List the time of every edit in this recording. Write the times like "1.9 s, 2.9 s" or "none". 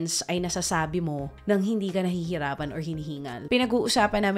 3.4 s